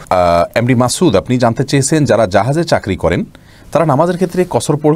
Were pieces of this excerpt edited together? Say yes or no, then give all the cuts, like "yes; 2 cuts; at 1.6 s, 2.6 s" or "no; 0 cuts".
no; 0 cuts